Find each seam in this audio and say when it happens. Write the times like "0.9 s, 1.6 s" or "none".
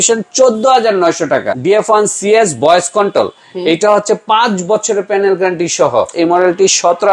1.5 s, 6.1 s